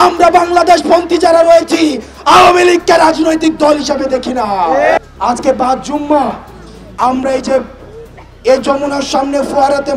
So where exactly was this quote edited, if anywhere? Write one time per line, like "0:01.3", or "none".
0:05.0